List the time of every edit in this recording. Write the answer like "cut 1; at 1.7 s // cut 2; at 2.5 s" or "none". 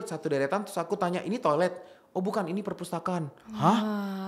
none